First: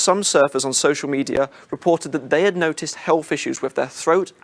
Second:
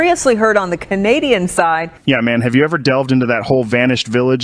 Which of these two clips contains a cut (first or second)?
second